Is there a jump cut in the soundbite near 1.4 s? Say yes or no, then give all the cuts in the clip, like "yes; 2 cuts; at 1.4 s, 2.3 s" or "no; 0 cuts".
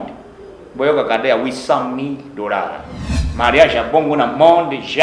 no; 1 cut; at 3.2 s